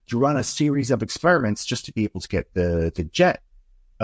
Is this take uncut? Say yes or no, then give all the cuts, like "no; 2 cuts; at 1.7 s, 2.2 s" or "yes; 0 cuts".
yes; 0 cuts